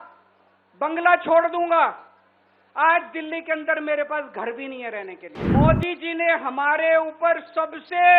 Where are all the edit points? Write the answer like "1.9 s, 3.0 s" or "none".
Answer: 5.3 s